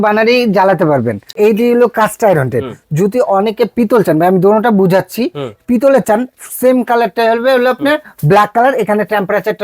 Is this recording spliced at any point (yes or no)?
yes